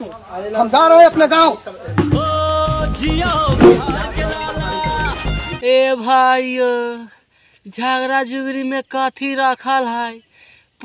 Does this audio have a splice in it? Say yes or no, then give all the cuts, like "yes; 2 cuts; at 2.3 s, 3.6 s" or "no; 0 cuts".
yes; 1 cut; at 5.7 s